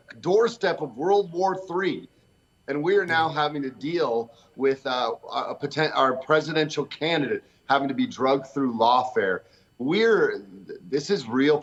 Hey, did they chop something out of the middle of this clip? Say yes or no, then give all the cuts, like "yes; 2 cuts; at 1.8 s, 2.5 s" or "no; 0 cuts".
no; 0 cuts